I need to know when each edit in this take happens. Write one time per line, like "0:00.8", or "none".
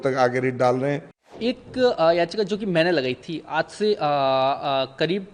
0:01.2